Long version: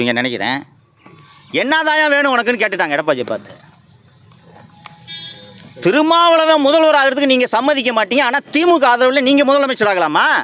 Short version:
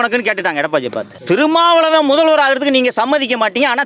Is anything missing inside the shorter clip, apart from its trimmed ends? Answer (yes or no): yes